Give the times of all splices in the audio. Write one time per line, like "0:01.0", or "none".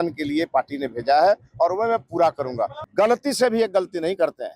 0:02.8